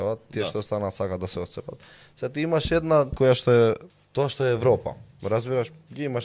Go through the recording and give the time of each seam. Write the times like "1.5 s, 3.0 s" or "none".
3.1 s, 3.9 s

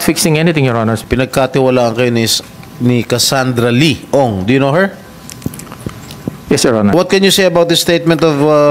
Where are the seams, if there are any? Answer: 1.0 s, 6.9 s

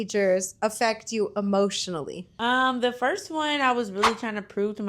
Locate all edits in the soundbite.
2.2 s

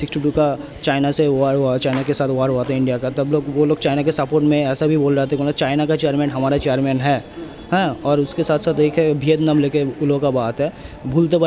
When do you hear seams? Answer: none

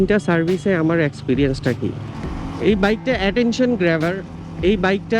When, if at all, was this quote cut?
2.1 s

